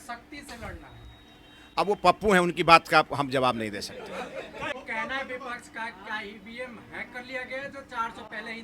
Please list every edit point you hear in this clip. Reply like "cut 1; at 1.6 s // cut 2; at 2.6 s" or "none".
cut 1; at 4.7 s